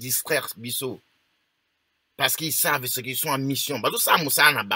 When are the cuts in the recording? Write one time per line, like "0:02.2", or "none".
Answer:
none